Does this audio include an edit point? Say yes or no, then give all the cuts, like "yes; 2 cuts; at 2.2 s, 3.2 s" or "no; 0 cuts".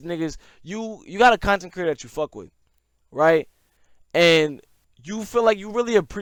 no; 0 cuts